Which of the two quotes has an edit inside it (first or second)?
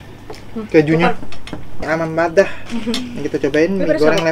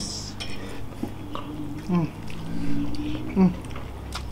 first